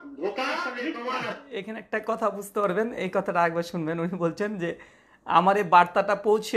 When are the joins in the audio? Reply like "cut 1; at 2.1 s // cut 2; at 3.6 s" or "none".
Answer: cut 1; at 1.0 s